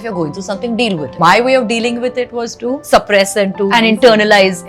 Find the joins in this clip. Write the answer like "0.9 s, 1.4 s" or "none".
1.1 s, 3.7 s